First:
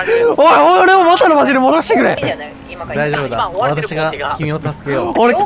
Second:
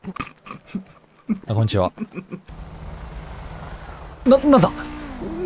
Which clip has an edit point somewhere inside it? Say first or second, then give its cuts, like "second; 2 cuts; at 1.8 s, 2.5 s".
second; 2 cuts; at 2.4 s, 4.2 s